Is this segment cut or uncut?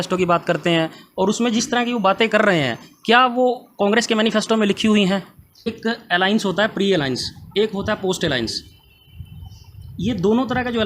cut